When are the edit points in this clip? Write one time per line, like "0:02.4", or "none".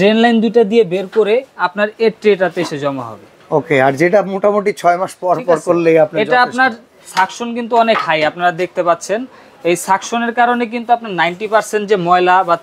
none